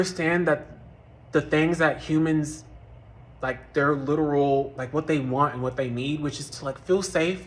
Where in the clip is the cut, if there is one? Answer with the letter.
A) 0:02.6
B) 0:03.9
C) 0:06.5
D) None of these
D